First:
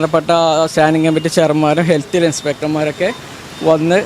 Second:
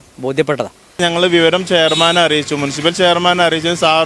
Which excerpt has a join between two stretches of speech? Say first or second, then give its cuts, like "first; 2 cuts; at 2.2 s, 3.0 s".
second; 1 cut; at 1.0 s